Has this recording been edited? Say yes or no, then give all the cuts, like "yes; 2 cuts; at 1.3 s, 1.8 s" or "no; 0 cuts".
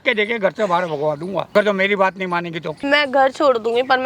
yes; 2 cuts; at 1.5 s, 2.8 s